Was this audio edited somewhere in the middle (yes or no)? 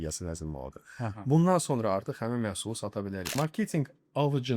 yes